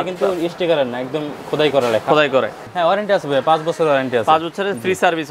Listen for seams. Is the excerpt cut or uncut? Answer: cut